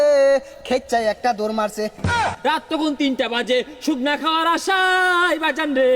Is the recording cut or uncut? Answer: cut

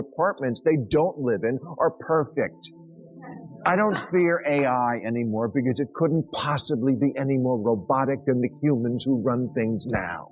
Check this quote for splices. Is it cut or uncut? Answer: uncut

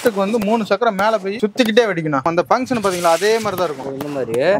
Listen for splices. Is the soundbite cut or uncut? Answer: cut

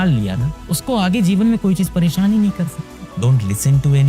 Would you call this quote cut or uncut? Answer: cut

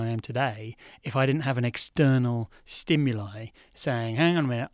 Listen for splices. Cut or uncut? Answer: uncut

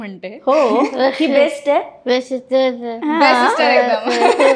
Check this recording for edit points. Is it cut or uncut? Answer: uncut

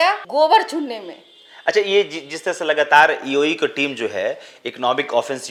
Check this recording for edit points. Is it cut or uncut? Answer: uncut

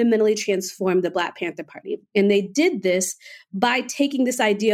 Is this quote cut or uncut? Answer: uncut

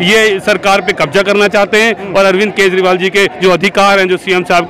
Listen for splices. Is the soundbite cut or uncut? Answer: uncut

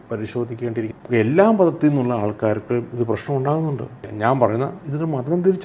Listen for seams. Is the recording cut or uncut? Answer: cut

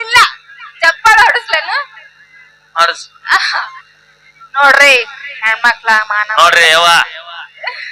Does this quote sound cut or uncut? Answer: uncut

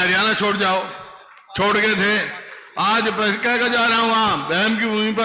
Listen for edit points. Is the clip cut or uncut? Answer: uncut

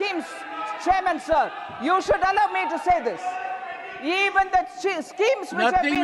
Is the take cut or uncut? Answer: uncut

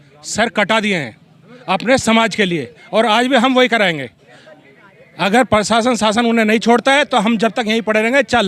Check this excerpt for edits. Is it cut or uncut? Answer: uncut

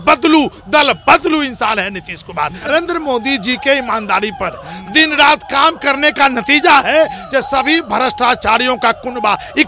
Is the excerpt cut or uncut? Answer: cut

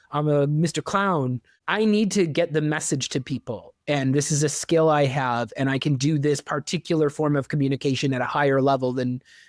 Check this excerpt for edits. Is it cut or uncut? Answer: cut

